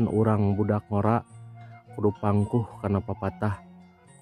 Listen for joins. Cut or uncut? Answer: uncut